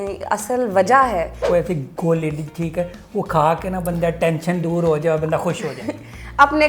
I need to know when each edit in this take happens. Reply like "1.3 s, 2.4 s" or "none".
1.4 s